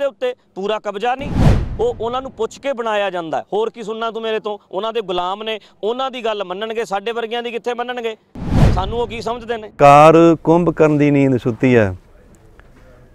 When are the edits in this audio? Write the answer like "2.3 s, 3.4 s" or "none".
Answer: 9.8 s